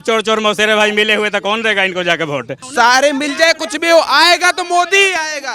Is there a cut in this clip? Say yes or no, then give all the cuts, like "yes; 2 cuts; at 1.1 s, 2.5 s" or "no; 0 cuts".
yes; 1 cut; at 2.6 s